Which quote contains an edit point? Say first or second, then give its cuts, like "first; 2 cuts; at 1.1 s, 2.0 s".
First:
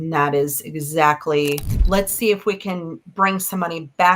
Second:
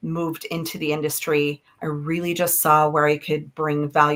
first; 1 cut; at 1.7 s